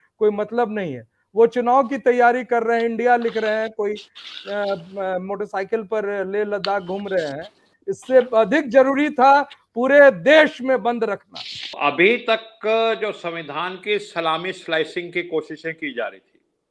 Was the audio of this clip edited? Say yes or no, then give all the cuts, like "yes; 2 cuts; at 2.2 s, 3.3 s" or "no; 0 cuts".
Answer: yes; 1 cut; at 11.7 s